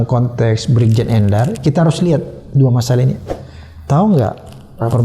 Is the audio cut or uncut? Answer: cut